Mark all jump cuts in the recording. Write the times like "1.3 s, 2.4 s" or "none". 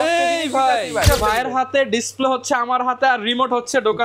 1.1 s